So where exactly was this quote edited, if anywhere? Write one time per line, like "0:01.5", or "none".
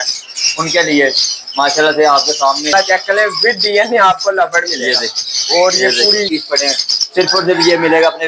0:02.7
0:06.3